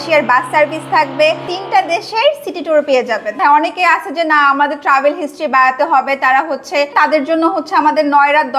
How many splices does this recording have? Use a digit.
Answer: 3